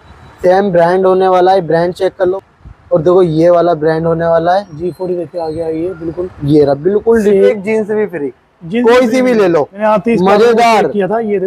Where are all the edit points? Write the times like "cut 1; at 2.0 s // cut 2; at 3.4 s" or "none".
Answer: cut 1; at 2.4 s // cut 2; at 7.5 s // cut 3; at 9.7 s